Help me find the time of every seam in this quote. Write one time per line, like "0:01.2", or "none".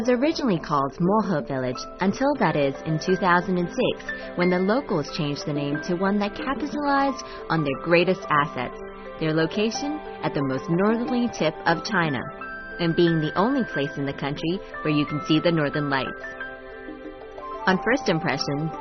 0:15.4